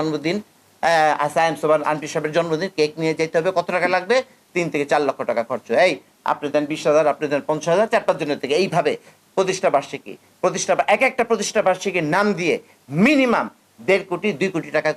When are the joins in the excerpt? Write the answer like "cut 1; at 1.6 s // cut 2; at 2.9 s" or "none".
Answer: none